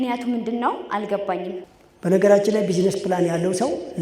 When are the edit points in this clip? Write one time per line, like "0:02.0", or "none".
0:01.6